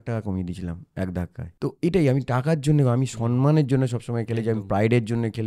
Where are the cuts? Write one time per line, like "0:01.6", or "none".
0:01.4